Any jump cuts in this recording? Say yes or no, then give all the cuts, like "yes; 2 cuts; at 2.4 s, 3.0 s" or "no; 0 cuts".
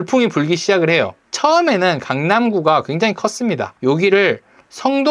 yes; 2 cuts; at 1.2 s, 3.7 s